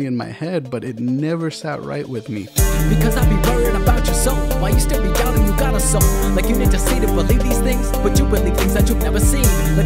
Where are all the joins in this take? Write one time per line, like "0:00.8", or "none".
0:02.5